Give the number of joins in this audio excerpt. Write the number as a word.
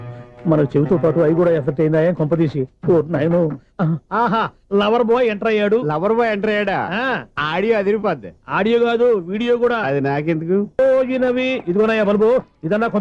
one